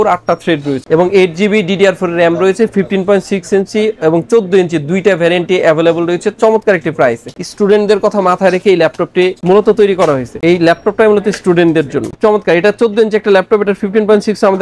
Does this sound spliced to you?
no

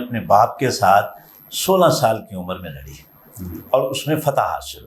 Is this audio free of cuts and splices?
yes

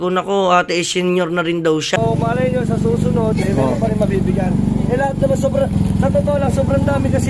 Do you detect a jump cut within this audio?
yes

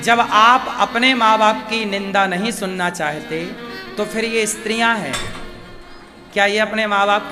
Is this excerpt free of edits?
yes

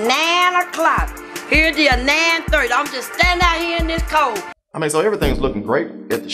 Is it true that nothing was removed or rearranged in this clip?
no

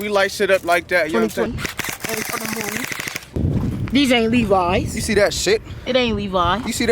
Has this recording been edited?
yes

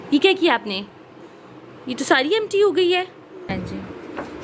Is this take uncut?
no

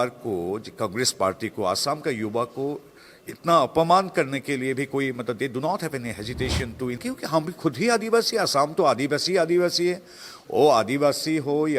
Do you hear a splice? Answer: yes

